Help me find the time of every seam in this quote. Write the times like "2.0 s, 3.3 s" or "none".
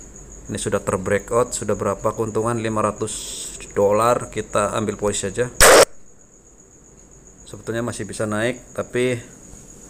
none